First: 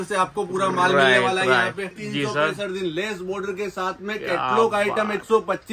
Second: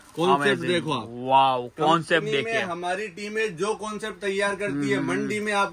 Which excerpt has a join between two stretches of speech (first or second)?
first